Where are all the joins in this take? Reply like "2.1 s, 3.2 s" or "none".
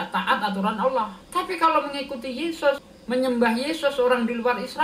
1.2 s, 2.9 s

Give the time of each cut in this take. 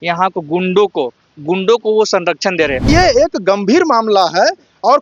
2.9 s

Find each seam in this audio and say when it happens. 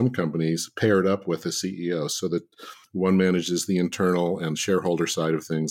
none

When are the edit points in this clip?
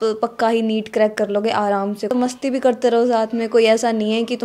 2.1 s

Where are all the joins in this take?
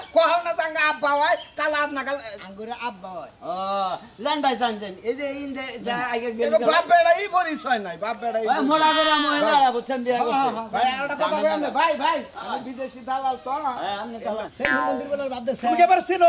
14.5 s

